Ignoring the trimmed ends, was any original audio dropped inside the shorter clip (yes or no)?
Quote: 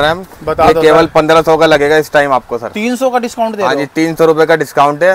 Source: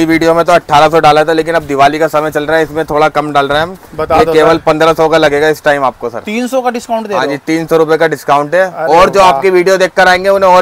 no